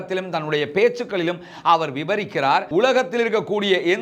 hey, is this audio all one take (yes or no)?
no